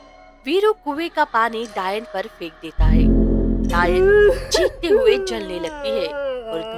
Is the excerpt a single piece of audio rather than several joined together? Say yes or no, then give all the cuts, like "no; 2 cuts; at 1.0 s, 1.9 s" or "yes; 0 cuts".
yes; 0 cuts